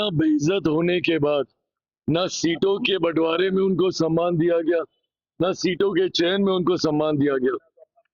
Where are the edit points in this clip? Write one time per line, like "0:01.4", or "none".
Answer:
none